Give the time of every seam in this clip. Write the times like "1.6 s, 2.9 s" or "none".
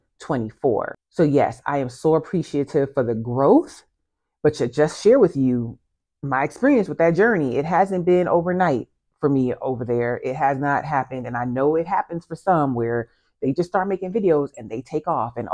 1.0 s